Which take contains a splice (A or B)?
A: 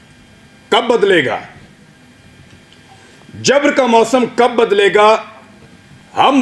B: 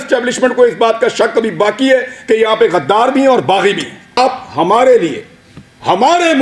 B